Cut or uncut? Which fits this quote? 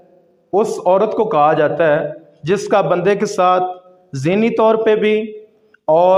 uncut